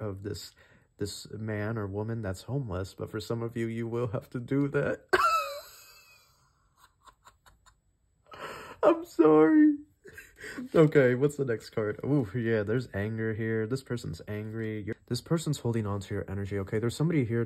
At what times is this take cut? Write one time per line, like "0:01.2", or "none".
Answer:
0:14.9